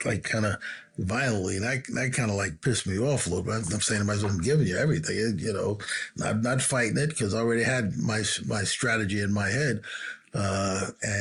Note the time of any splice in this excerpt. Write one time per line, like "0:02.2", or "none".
none